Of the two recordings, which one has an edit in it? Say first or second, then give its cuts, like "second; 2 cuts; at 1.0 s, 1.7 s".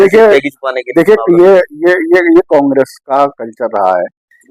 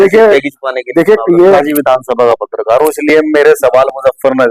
second; 1 cut; at 1.6 s